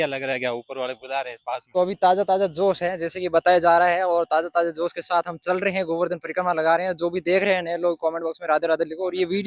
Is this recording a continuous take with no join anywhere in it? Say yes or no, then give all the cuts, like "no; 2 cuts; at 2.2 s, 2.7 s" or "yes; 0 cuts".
yes; 0 cuts